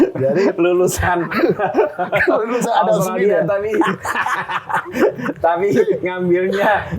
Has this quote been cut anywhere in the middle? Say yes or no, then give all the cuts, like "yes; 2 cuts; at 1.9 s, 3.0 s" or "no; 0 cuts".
no; 0 cuts